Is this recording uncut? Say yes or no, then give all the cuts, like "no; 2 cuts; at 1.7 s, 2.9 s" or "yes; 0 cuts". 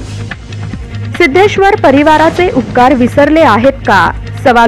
no; 1 cut; at 1.2 s